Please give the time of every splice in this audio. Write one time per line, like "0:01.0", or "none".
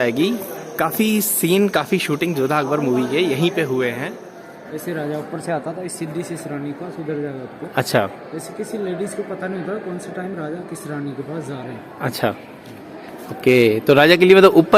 0:04.2